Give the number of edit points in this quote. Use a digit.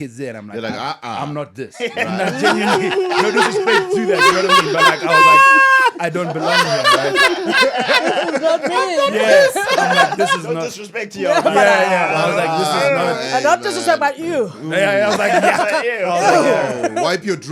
0